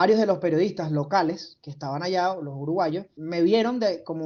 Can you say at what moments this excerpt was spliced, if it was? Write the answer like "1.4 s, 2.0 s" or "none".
3.1 s